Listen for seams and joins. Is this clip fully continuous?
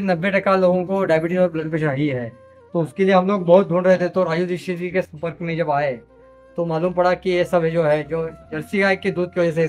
no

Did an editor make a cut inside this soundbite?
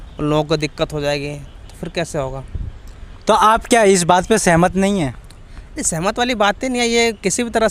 no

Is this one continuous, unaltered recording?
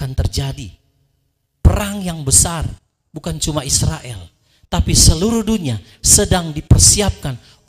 yes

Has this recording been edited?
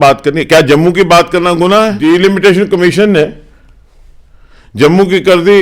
yes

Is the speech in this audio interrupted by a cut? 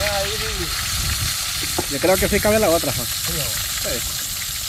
no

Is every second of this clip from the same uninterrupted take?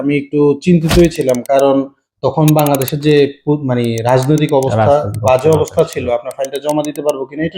yes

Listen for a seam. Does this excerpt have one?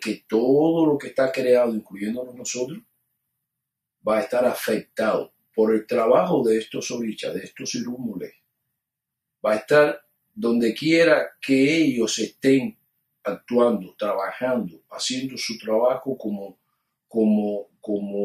no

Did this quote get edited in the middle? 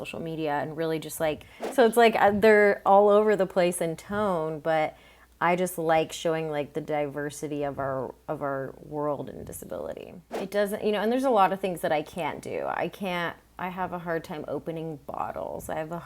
yes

